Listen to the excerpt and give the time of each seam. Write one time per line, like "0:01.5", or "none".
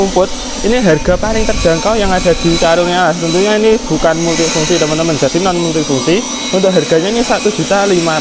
none